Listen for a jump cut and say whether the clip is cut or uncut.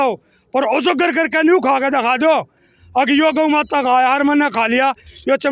uncut